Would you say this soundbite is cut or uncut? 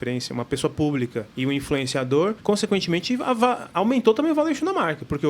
cut